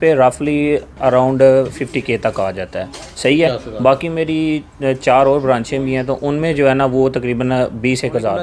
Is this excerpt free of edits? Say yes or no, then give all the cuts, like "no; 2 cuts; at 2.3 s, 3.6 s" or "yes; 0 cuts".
yes; 0 cuts